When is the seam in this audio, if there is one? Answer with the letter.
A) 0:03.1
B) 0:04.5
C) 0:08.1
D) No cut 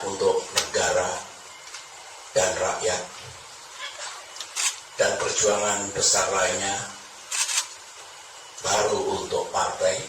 D